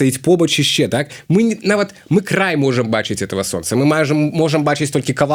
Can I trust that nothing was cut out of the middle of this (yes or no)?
yes